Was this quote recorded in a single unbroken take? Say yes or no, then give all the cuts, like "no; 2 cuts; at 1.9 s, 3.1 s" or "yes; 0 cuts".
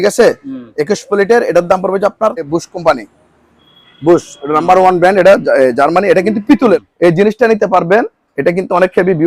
no; 2 cuts; at 2.5 s, 6.8 s